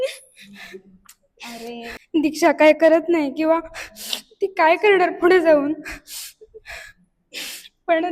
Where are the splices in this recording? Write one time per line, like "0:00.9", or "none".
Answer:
0:02.0